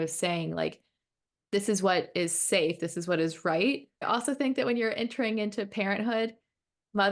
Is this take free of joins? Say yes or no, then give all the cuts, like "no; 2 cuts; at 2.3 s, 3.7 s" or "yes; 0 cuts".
no; 1 cut; at 4.1 s